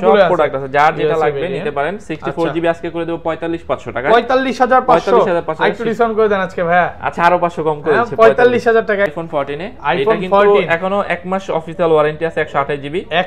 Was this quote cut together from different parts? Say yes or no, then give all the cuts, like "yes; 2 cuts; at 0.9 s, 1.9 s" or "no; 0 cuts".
yes; 1 cut; at 9.1 s